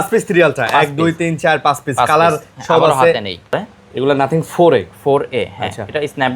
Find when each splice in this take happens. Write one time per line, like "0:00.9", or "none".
0:03.5